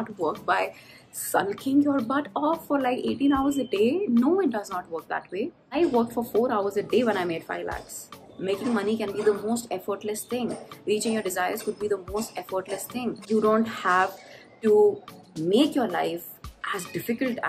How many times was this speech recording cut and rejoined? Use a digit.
3